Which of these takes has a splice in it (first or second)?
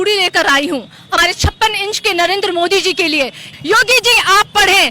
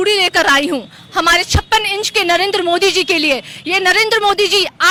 first